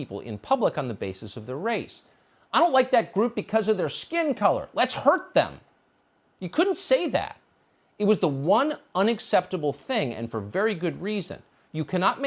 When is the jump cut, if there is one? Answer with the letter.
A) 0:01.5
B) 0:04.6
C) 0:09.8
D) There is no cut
C